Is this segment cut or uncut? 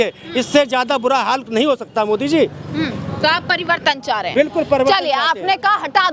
uncut